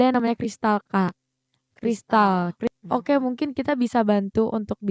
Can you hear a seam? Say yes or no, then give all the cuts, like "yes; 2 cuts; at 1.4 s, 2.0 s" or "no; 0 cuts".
yes; 1 cut; at 2.7 s